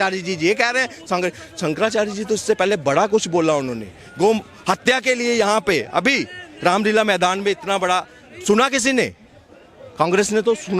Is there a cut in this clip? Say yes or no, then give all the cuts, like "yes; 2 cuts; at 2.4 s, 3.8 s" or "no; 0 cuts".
no; 0 cuts